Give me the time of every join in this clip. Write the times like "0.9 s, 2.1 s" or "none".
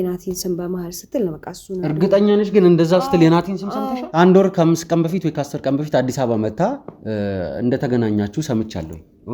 4.0 s